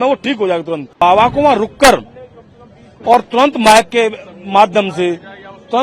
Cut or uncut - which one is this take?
cut